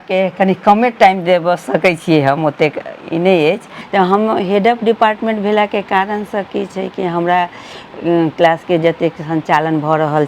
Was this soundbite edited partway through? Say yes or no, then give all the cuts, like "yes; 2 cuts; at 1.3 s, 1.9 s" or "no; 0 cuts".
yes; 1 cut; at 3.7 s